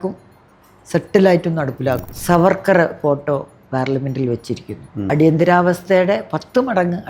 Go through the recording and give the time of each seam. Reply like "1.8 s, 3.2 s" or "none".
2.1 s, 4.9 s